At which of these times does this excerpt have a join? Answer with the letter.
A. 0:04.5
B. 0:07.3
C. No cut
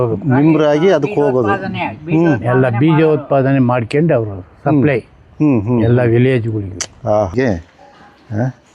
B